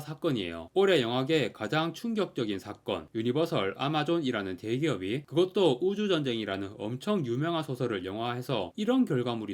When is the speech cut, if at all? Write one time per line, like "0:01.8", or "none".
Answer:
none